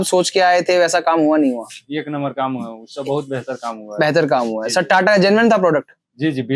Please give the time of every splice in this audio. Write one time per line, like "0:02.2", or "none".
none